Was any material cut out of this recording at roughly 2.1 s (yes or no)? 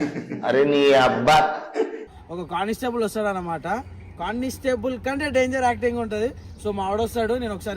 yes